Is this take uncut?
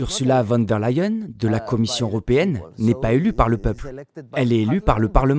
yes; 0 cuts

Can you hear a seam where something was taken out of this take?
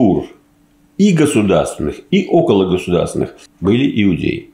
yes; 1 cut; at 3.4 s

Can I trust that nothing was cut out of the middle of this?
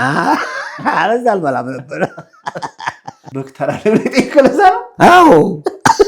no; 1 cut; at 3.3 s

